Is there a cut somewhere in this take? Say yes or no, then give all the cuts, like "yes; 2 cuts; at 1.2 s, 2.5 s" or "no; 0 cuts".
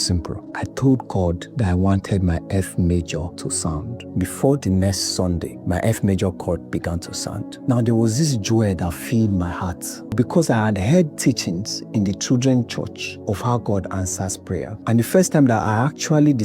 yes; 3 cuts; at 4.1 s, 10.1 s, 13.1 s